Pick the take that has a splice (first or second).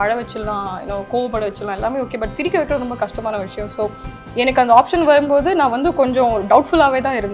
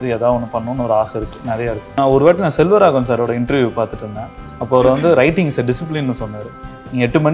second